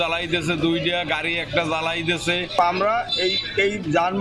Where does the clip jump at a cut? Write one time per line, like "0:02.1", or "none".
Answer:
0:02.5